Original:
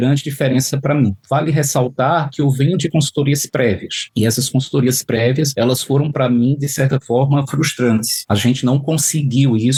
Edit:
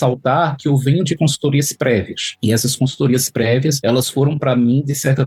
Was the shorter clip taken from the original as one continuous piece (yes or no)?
yes